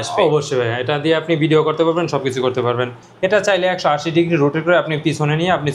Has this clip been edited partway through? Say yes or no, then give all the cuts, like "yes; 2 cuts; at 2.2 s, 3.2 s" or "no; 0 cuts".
yes; 1 cut; at 3.0 s